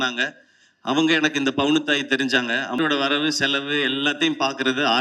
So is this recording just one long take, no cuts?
no; 1 cut; at 2.8 s

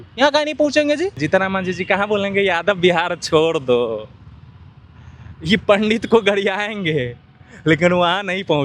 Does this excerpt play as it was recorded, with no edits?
no; 1 cut; at 1.2 s

